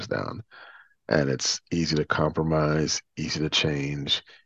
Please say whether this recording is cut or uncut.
uncut